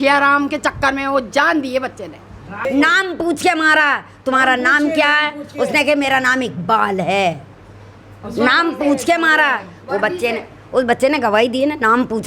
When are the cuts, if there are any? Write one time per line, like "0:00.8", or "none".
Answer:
0:02.6